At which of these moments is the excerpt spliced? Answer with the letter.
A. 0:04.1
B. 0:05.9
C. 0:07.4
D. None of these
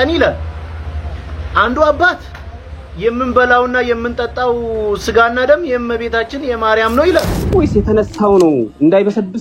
C